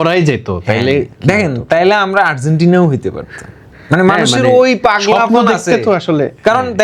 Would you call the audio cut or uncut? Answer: uncut